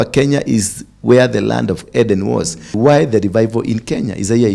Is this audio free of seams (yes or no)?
no